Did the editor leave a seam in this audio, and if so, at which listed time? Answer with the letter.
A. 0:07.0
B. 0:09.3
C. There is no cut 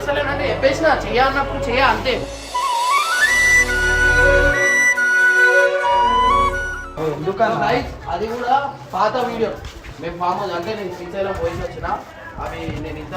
C